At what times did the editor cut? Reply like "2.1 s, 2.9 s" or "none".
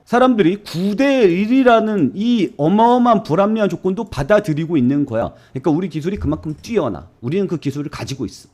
5.2 s